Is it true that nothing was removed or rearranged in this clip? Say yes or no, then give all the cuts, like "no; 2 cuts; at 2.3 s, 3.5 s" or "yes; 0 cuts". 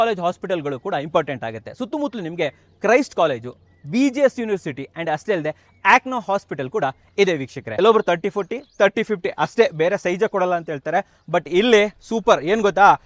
no; 1 cut; at 7.6 s